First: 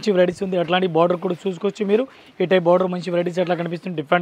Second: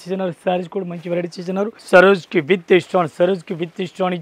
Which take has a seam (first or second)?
second